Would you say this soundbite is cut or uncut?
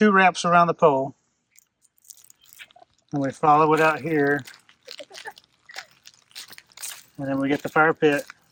uncut